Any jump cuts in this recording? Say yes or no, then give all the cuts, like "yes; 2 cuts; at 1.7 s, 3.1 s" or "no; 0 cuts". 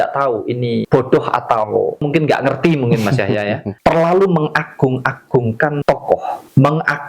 yes; 4 cuts; at 0.9 s, 2.1 s, 3.7 s, 5.9 s